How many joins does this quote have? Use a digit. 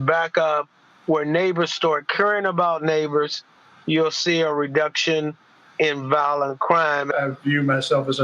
1